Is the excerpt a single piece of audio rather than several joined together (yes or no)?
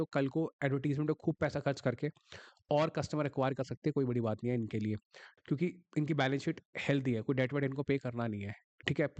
no